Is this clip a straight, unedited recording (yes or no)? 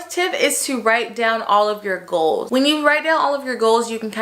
no